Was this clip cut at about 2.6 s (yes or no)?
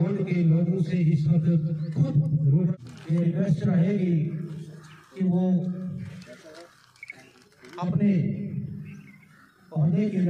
yes